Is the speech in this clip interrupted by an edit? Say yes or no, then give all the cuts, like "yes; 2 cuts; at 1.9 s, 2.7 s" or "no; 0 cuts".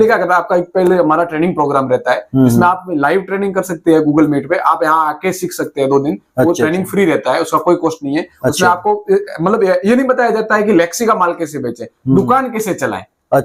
no; 0 cuts